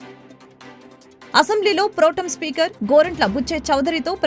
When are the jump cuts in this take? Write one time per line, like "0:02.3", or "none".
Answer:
0:01.3